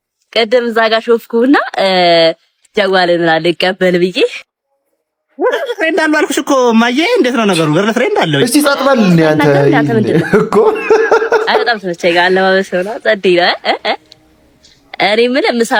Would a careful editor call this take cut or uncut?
uncut